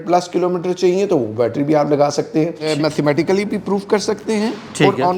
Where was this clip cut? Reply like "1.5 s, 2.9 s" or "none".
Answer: 2.7 s

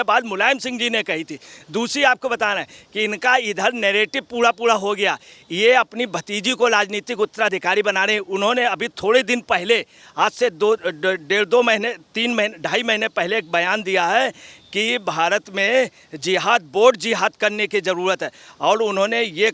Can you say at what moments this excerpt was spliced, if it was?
none

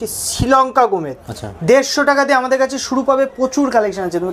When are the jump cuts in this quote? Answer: none

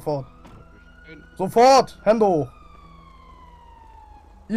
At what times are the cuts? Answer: none

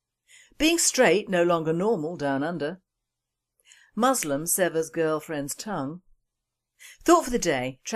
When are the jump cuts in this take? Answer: 1.2 s

